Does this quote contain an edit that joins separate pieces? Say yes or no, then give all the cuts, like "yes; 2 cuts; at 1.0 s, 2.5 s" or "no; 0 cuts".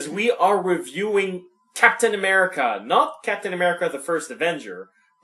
yes; 1 cut; at 2.7 s